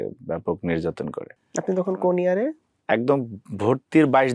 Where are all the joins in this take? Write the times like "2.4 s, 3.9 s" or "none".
1.3 s, 2.7 s